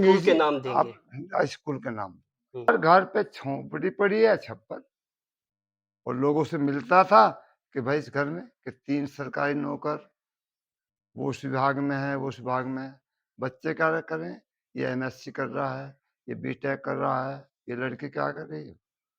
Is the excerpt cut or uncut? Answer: cut